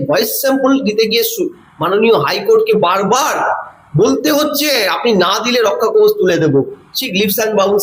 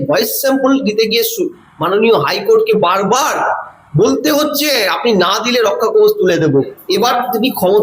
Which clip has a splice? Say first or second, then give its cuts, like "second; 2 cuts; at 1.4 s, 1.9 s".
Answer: second; 1 cut; at 6.8 s